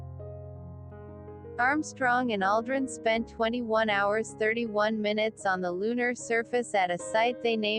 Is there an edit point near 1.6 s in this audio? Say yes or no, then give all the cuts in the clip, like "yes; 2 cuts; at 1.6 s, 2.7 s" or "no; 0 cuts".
yes; 1 cut; at 1.6 s